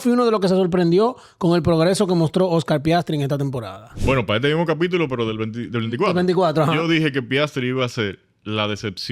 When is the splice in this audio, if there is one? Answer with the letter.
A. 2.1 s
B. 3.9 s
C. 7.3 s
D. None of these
B